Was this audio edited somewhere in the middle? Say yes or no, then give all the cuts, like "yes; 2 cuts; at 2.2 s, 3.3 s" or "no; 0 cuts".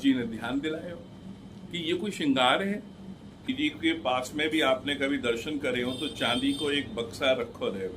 yes; 1 cut; at 3.5 s